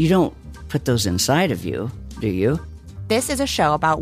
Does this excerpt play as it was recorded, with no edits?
no; 1 cut; at 2.7 s

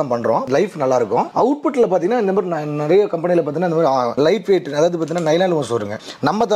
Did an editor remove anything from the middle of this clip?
yes; 1 cut; at 1.3 s

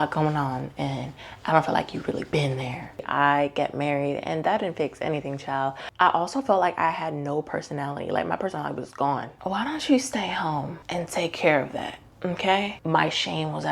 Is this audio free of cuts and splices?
no; 4 cuts; at 3.1 s, 5.9 s, 9.3 s, 12.8 s

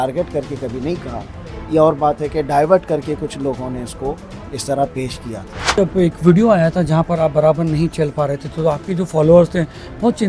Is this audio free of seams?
no; 1 cut; at 5.8 s

